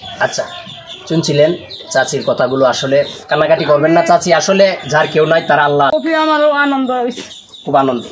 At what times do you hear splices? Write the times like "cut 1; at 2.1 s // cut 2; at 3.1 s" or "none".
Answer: cut 1; at 5.9 s